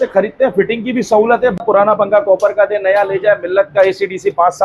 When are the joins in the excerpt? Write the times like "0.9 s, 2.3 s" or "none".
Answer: 1.6 s